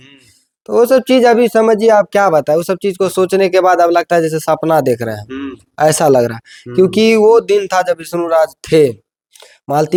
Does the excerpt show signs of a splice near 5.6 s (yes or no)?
no